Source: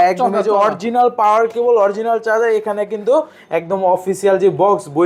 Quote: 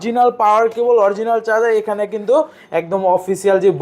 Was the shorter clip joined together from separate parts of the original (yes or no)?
no